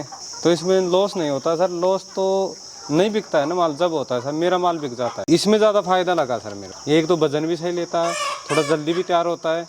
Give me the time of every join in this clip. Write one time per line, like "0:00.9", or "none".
0:05.2